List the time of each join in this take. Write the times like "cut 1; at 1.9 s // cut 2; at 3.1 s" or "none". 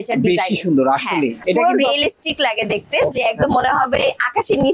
cut 1; at 1.4 s

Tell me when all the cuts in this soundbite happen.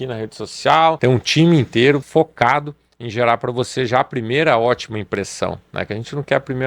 cut 1; at 1.0 s // cut 2; at 2.0 s

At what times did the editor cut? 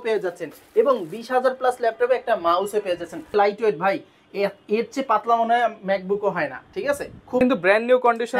cut 1; at 3.3 s // cut 2; at 7.4 s

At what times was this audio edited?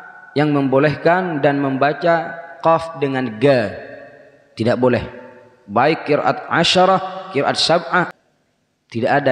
cut 1; at 8.1 s

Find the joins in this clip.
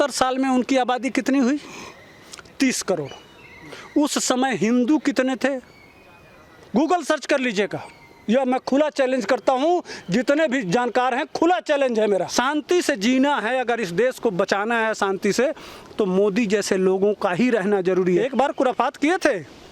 cut 1; at 12.3 s // cut 2; at 18.2 s

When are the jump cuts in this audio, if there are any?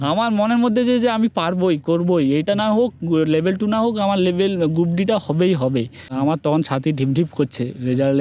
cut 1; at 6.0 s

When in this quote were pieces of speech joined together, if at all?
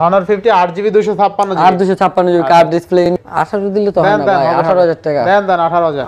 cut 1; at 3.2 s

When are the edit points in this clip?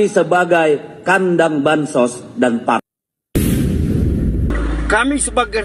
cut 1; at 4.5 s

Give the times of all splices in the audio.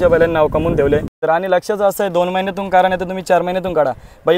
cut 1; at 1.1 s

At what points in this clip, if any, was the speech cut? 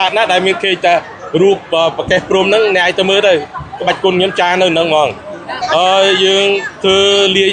cut 1; at 5.5 s

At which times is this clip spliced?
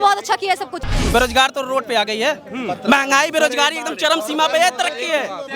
cut 1; at 0.9 s

